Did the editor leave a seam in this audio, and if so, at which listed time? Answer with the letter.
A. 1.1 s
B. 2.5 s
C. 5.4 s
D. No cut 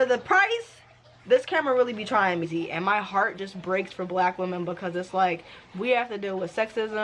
B